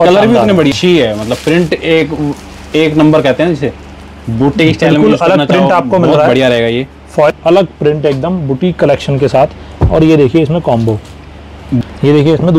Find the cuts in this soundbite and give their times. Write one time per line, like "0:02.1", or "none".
0:00.7
0:07.3
0:11.8